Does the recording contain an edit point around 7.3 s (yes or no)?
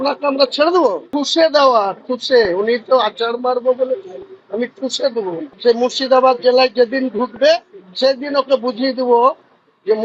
no